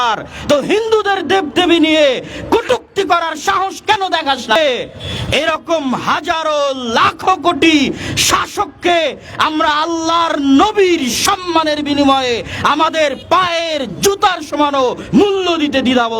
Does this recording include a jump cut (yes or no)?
yes